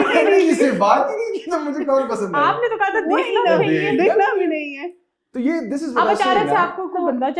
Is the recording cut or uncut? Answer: uncut